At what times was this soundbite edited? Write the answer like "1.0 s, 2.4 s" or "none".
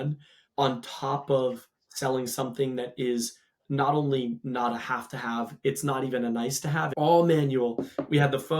6.9 s